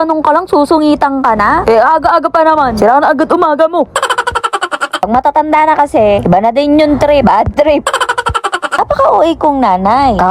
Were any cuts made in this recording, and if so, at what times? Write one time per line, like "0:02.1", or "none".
0:05.1
0:08.8